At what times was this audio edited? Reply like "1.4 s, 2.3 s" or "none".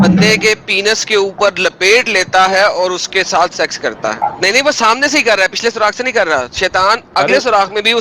4.2 s